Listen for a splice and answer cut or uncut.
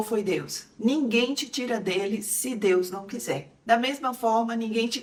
uncut